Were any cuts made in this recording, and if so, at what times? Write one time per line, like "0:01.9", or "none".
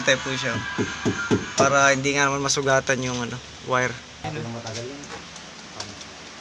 0:04.2